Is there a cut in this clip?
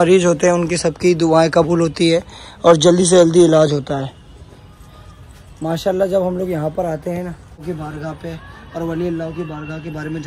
no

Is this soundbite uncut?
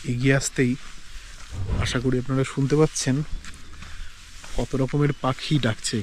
yes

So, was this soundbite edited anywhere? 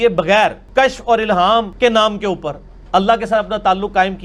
no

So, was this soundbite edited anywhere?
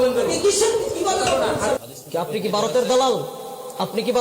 yes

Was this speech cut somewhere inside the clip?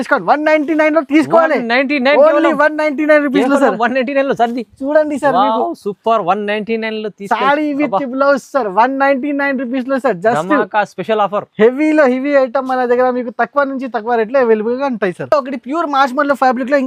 no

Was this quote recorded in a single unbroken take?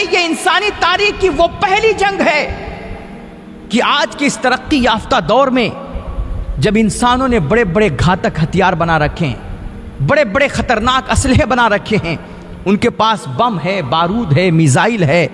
yes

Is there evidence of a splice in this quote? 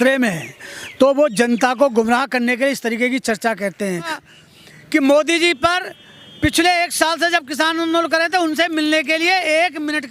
yes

